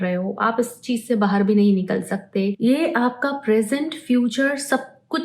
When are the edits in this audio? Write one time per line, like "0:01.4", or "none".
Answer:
0:02.6